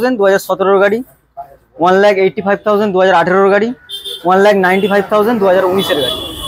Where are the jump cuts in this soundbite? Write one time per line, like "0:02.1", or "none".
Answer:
none